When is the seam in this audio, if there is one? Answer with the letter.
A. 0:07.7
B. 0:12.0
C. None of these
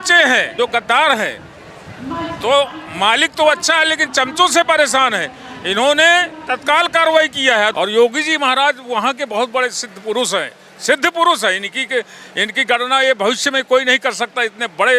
A